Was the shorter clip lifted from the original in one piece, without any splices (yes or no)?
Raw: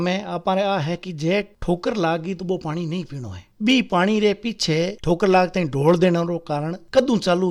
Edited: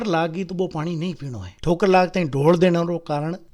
no